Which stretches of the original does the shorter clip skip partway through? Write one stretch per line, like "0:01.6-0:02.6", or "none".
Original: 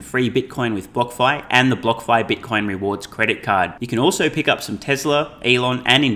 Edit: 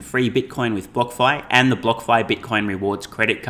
none